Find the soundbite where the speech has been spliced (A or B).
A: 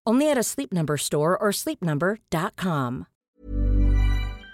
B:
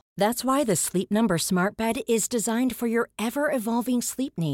A